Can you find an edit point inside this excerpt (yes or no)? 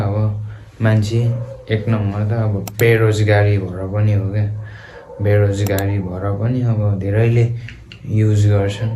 no